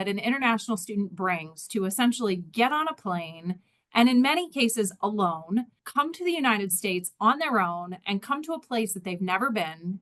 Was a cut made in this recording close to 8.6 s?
no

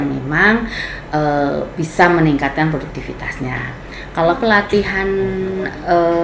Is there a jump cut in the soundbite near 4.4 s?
yes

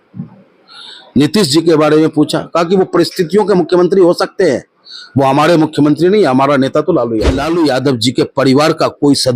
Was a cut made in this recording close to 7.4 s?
yes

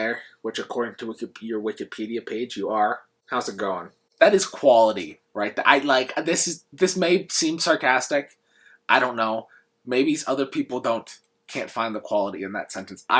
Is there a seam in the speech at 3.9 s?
yes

